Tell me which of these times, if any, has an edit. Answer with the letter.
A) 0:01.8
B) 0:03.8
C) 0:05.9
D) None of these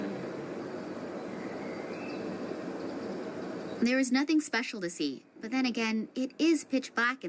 B